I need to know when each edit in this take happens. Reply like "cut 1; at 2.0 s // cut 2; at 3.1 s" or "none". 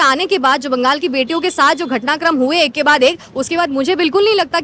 none